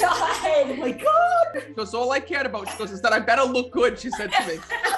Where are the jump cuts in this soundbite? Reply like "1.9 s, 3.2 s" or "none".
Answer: 1.7 s